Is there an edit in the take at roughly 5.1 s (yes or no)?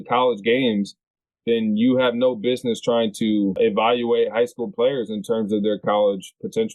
no